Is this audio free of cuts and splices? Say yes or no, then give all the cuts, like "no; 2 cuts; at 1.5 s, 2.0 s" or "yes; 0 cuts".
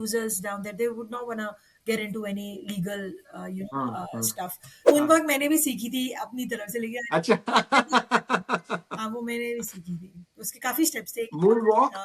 no; 1 cut; at 4.8 s